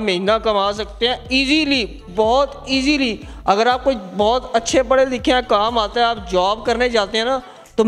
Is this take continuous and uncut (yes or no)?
yes